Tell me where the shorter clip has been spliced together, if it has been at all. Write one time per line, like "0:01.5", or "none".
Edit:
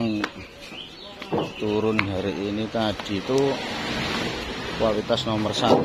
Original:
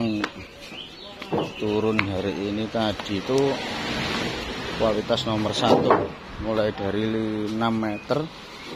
none